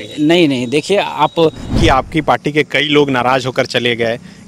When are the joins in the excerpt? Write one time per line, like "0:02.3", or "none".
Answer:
0:01.7